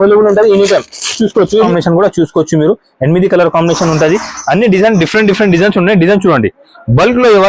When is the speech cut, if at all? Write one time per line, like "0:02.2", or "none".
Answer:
0:01.7